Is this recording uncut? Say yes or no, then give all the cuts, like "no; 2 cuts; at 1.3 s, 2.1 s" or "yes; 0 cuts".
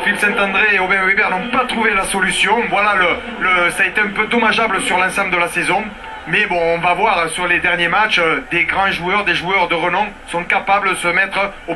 no; 1 cut; at 7.6 s